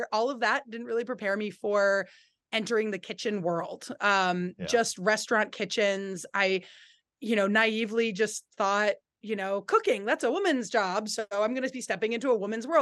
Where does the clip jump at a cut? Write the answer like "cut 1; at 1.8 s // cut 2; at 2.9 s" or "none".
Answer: none